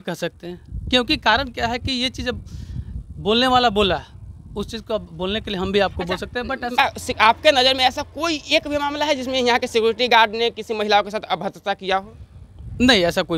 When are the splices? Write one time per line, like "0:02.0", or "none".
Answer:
0:06.7

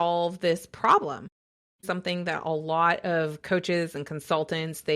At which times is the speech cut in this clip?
0:01.8

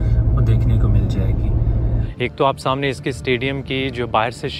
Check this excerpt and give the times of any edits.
0:02.0

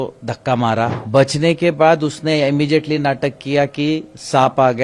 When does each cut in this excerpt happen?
0:01.0

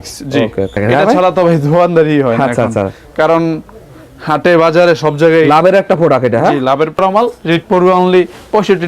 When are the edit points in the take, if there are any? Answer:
0:00.8
0:07.0

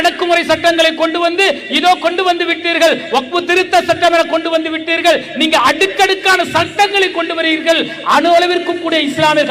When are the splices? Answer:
none

